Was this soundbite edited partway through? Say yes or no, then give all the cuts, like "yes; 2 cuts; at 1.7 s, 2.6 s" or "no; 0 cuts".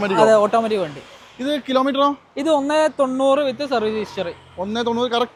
no; 0 cuts